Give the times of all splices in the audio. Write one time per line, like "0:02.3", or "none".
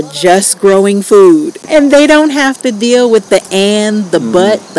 0:01.6